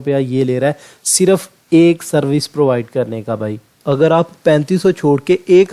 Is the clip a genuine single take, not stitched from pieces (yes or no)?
no